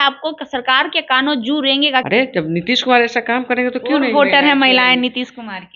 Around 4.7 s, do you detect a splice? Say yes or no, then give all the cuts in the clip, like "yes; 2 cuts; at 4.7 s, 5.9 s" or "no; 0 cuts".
no; 1 cut; at 2.1 s